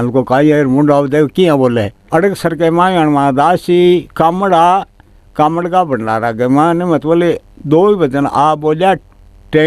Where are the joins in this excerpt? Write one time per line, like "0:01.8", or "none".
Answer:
0:02.0